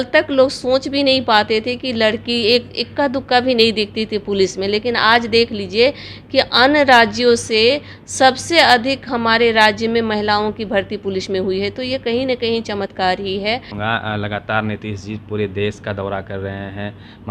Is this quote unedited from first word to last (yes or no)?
no